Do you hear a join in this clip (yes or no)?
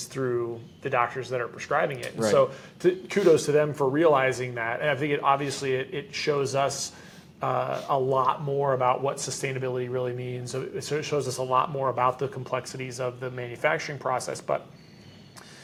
no